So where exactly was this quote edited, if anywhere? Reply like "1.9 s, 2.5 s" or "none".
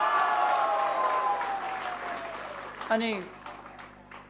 none